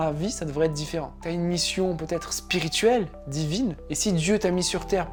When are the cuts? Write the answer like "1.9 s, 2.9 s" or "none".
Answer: none